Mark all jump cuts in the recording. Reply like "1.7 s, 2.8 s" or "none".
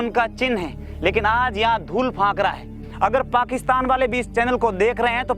2.8 s